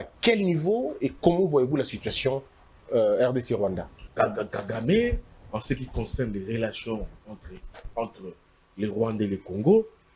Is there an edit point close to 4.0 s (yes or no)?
yes